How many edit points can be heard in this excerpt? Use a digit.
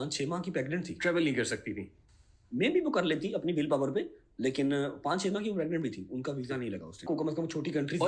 1